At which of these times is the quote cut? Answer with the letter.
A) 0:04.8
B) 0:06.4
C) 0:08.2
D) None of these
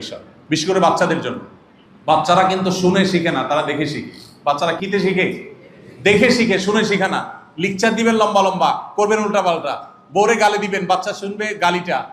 A